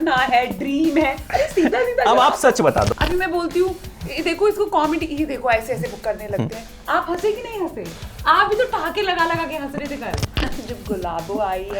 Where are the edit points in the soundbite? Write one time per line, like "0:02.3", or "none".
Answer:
0:02.9
0:10.3